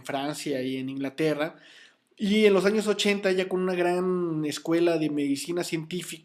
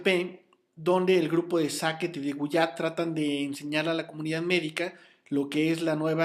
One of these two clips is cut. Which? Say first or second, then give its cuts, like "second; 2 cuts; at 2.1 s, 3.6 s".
first; 1 cut; at 2.7 s